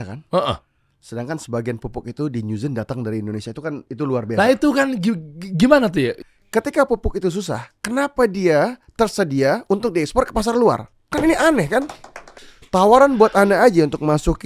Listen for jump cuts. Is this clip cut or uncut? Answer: uncut